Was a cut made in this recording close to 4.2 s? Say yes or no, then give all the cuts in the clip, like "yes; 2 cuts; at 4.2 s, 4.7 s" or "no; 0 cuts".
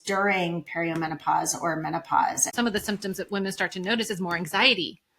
no; 1 cut; at 2.5 s